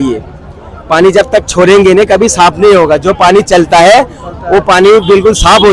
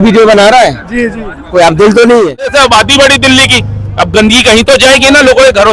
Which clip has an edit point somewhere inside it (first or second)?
second